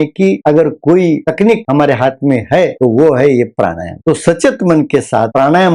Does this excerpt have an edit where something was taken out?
no; 0 cuts

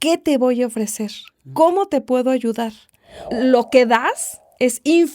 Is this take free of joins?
no; 1 cut; at 3.3 s

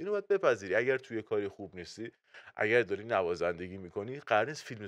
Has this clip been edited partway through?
no; 0 cuts

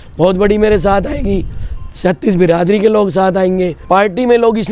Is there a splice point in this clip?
yes; 1 cut; at 3.8 s

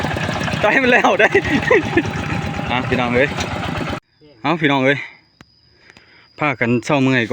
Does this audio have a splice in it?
yes; 1 cut; at 4.1 s

